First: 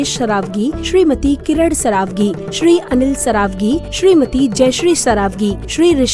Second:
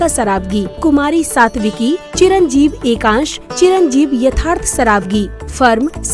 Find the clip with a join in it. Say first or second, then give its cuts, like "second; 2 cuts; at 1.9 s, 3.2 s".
first; 1 cut; at 3.7 s